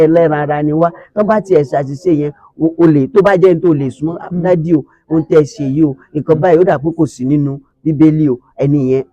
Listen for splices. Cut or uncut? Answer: uncut